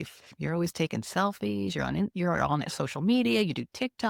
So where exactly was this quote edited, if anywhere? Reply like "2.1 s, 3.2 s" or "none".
none